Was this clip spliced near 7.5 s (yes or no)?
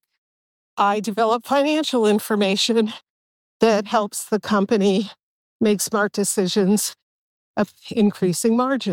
yes